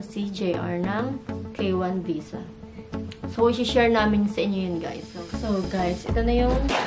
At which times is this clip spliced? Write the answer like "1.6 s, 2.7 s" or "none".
5.0 s